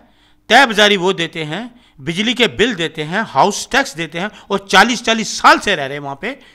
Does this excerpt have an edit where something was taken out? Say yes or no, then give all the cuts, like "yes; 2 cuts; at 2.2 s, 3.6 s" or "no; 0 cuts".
no; 0 cuts